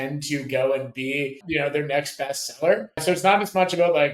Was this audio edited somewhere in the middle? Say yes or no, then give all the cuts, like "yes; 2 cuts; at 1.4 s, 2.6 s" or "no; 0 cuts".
yes; 2 cuts; at 1.4 s, 3.0 s